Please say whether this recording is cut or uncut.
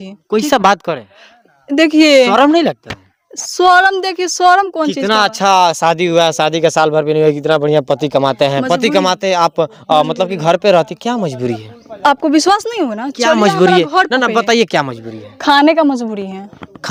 uncut